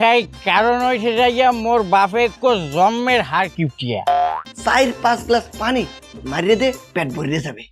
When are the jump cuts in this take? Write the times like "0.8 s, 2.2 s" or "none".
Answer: 4.4 s